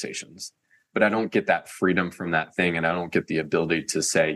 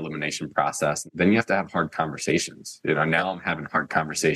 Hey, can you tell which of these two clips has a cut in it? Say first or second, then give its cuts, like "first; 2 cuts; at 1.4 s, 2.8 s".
second; 1 cut; at 1.1 s